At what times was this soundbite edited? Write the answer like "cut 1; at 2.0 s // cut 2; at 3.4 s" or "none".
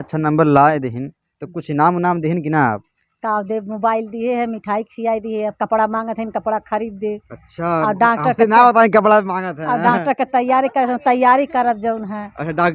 none